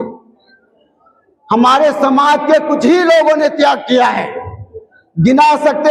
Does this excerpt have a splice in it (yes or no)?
no